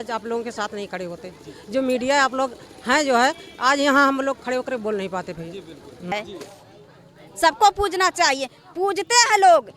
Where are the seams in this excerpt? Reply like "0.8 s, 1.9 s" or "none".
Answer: 6.1 s